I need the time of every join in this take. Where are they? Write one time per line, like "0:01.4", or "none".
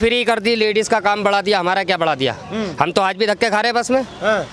none